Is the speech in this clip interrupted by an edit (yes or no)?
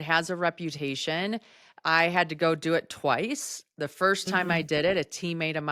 no